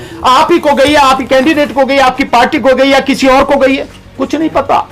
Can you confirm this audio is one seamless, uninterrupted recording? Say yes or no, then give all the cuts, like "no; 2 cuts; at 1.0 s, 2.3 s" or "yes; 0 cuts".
yes; 0 cuts